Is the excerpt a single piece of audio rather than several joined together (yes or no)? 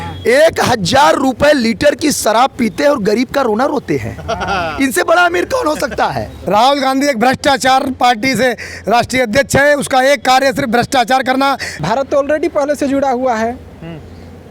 no